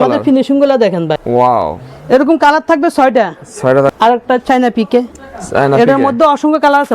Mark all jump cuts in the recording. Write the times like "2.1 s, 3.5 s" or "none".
1.2 s, 3.9 s